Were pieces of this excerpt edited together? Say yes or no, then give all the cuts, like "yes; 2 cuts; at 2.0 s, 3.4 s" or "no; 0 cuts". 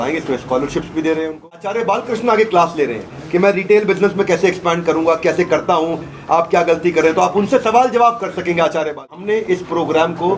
yes; 2 cuts; at 1.7 s, 9.3 s